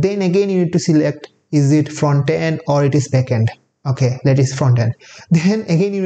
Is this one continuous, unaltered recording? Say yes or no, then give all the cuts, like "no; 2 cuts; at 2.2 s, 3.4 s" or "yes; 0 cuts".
yes; 0 cuts